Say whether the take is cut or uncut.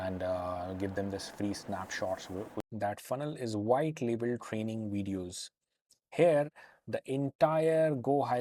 cut